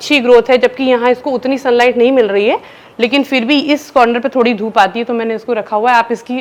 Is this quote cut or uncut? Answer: uncut